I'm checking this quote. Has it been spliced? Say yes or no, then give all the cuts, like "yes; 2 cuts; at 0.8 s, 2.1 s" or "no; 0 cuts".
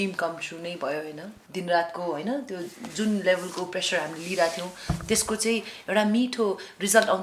yes; 1 cut; at 1.4 s